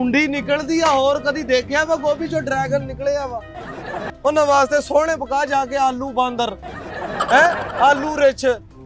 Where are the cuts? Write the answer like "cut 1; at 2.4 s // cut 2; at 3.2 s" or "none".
cut 1; at 4.0 s